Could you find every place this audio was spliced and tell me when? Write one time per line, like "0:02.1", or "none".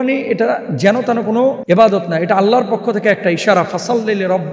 0:01.6